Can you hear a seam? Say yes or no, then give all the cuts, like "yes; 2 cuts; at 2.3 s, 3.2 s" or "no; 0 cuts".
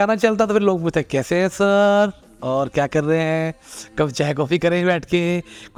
no; 0 cuts